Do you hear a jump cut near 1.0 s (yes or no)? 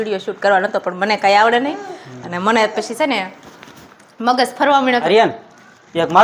no